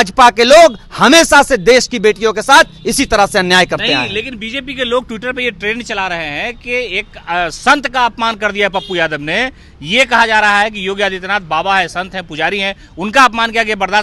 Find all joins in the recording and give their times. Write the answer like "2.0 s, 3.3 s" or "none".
none